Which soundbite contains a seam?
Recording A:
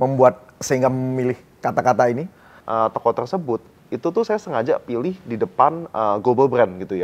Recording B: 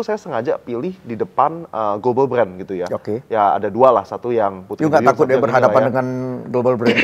A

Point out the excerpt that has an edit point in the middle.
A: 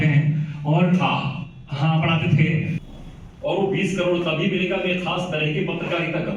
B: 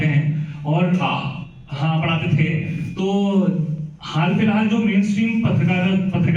A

